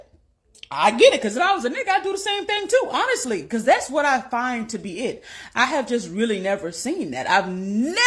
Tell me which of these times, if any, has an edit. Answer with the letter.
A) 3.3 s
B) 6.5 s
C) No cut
C